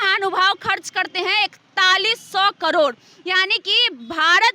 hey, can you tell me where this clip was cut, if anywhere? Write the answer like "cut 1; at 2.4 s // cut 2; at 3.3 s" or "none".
none